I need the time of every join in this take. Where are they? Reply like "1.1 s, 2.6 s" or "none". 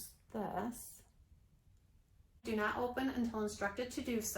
2.4 s